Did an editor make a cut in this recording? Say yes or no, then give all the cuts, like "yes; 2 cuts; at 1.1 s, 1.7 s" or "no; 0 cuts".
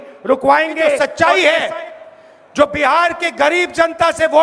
yes; 1 cut; at 1.0 s